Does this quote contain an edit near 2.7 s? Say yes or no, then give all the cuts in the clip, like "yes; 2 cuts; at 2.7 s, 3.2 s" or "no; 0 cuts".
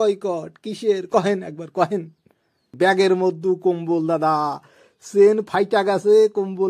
yes; 1 cut; at 2.7 s